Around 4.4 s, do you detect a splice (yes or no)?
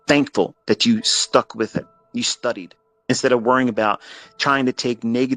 no